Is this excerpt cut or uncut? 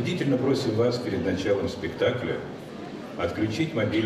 uncut